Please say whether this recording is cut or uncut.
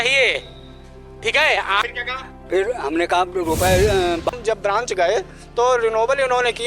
cut